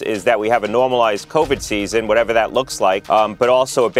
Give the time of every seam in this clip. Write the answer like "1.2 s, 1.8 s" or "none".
3.0 s